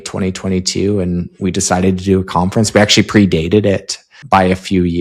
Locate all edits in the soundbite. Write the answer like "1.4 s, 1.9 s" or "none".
4.1 s